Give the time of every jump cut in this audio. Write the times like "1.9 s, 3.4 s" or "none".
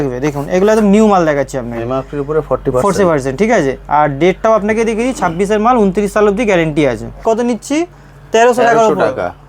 7.2 s